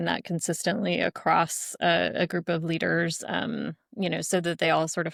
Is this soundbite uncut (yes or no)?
yes